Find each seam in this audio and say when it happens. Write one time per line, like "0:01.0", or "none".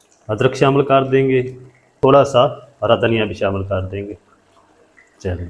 0:01.9